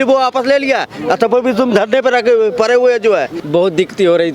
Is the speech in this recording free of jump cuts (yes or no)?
no